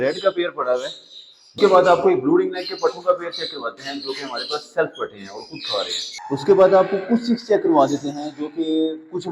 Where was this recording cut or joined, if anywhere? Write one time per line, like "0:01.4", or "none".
0:01.6
0:06.2